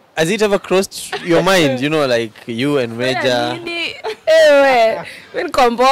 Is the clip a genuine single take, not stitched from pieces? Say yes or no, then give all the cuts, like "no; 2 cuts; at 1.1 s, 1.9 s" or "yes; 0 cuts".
yes; 0 cuts